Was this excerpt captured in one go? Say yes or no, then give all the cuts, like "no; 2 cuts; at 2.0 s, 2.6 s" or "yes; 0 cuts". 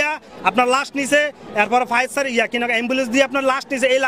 yes; 0 cuts